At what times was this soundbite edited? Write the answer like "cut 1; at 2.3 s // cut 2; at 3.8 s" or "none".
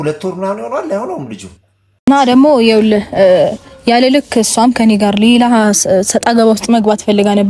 cut 1; at 2.1 s